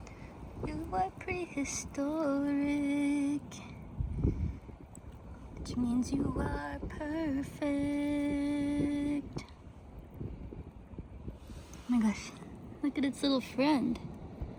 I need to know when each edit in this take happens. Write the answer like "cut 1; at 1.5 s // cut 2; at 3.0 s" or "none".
none